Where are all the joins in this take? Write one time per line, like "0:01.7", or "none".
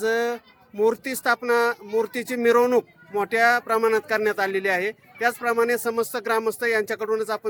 none